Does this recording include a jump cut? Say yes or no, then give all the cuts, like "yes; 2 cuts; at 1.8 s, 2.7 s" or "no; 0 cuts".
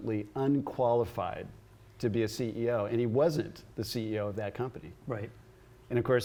no; 0 cuts